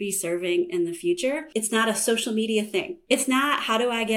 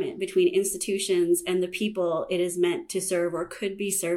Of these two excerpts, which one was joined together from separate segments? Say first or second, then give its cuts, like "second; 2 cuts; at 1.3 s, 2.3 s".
first; 2 cuts; at 1.4 s, 3.0 s